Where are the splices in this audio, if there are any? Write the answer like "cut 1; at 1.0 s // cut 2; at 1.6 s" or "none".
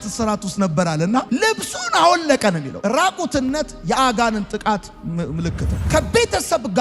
cut 1; at 5.7 s